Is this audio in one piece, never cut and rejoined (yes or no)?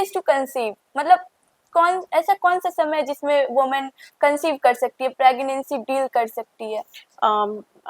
yes